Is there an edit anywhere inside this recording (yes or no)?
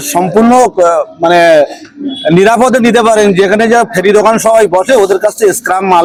no